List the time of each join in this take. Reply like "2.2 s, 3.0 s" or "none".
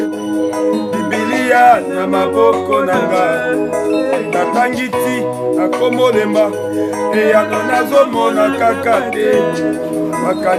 none